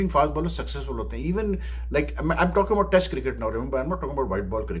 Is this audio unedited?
yes; 0 cuts

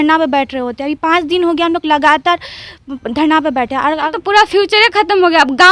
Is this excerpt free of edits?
no; 1 cut; at 4.1 s

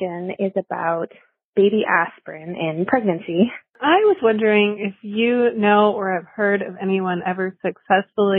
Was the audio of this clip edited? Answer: yes; 1 cut; at 3.8 s

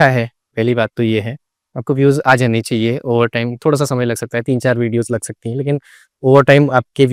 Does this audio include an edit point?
no; 0 cuts

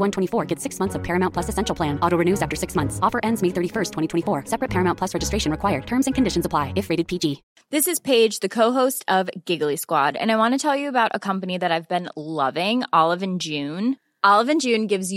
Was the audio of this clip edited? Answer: yes; 1 cut; at 7.4 s

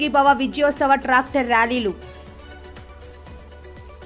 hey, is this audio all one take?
yes; 0 cuts

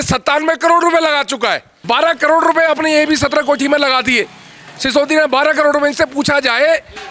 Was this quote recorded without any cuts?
no; 1 cut; at 1.7 s

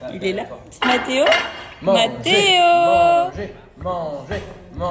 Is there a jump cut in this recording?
no; 0 cuts

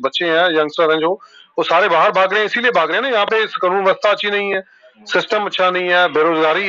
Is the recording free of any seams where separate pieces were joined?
yes; 0 cuts

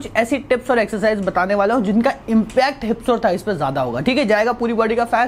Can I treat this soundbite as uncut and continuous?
yes; 0 cuts

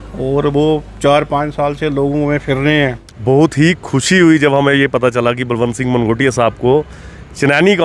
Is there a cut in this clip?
yes; 1 cut; at 3.2 s

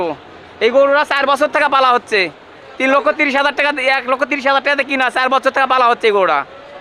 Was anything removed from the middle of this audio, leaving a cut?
no; 0 cuts

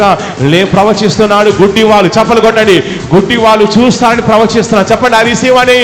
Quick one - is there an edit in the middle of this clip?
no; 0 cuts

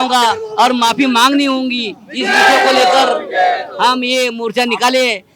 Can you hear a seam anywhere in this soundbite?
no; 0 cuts

